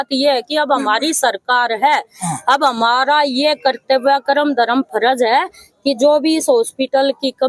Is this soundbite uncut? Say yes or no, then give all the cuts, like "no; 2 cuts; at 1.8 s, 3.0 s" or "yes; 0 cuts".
yes; 0 cuts